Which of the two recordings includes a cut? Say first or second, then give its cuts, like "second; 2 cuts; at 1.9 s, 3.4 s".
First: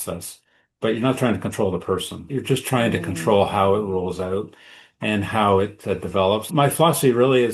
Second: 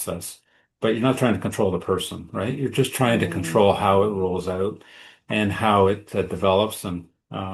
first; 2 cuts; at 2.2 s, 6.5 s